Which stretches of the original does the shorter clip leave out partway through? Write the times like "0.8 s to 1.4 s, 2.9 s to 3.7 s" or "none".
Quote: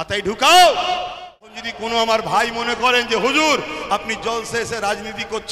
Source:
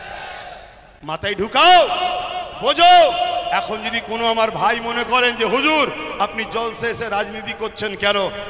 2.5 s to 3.6 s